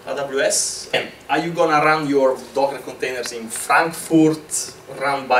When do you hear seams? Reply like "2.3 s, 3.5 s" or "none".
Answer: 0.9 s